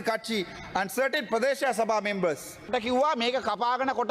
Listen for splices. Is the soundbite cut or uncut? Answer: cut